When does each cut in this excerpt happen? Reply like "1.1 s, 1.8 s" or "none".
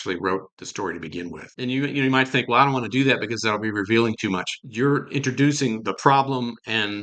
1.4 s, 4.6 s